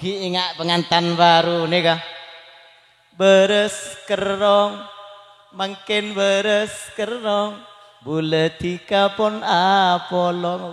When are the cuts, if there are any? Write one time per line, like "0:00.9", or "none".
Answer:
none